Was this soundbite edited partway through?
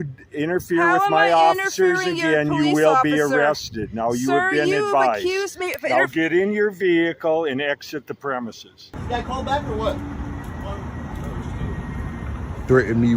yes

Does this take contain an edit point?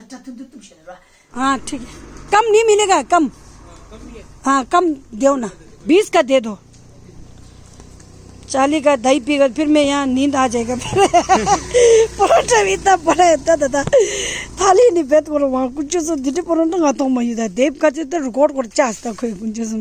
yes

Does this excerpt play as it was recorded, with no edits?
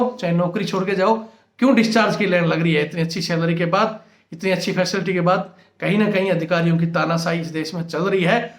yes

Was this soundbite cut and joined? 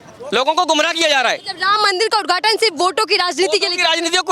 no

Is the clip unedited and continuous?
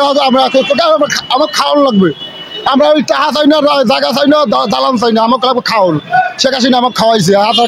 yes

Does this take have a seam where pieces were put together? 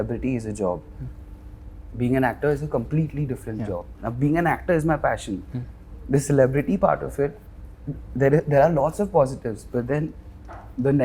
no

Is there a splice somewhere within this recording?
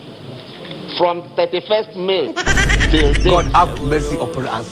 no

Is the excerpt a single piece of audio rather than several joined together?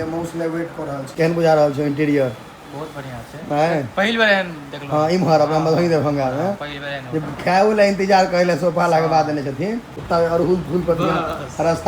no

